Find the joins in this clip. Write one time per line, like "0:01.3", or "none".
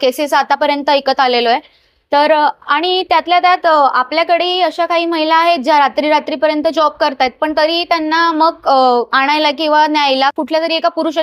none